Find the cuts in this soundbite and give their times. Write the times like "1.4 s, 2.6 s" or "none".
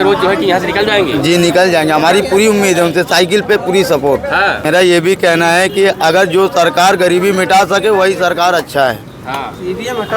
4.6 s